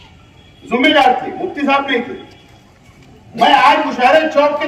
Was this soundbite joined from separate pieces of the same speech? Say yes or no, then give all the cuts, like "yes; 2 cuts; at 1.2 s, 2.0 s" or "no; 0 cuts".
no; 0 cuts